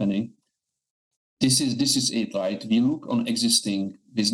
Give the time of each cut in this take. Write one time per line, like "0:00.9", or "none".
none